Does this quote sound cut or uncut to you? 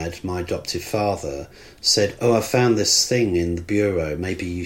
uncut